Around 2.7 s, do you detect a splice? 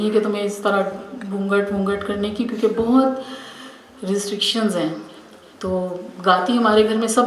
no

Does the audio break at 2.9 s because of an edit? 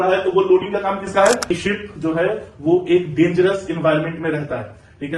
no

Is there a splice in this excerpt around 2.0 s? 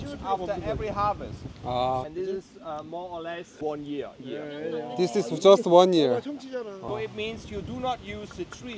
yes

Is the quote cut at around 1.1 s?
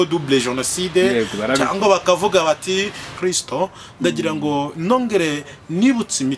no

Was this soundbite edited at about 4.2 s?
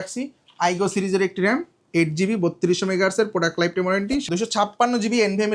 yes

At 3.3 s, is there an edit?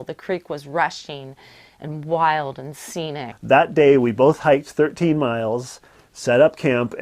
yes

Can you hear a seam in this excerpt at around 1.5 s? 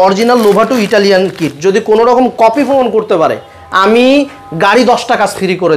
no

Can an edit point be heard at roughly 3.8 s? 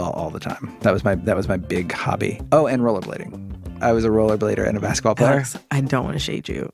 yes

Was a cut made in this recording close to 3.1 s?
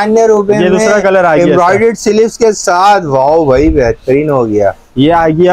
no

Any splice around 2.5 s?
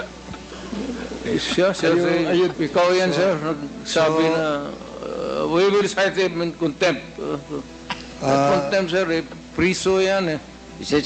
yes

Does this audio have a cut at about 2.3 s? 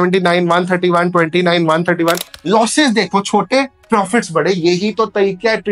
no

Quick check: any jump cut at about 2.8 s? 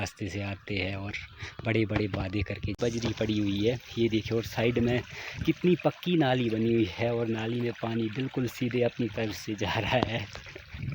yes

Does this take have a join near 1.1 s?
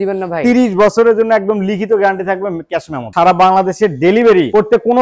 no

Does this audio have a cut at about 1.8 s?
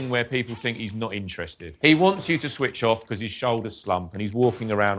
yes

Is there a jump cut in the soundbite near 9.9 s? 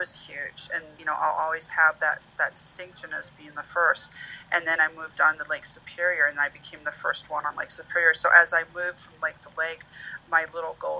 no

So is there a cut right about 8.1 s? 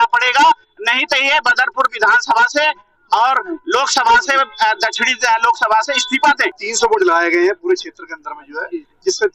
no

